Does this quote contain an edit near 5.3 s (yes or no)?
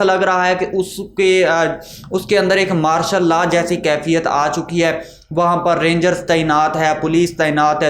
no